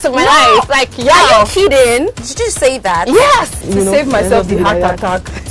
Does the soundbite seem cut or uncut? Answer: cut